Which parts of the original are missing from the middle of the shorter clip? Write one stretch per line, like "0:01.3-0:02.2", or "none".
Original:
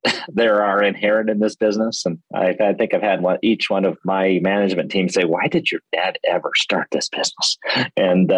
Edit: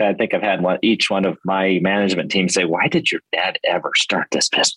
none